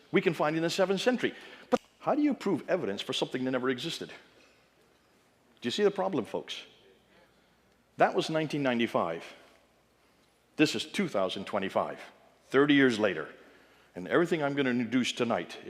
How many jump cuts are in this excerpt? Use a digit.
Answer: 1